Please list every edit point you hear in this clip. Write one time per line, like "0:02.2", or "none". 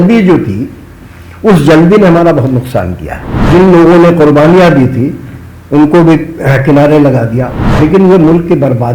0:03.4
0:07.6